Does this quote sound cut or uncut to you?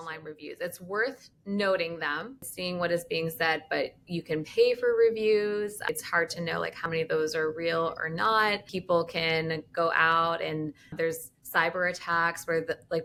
uncut